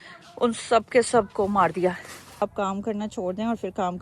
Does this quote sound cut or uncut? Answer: cut